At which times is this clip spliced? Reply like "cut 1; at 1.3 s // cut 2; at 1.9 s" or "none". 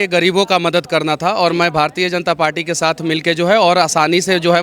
none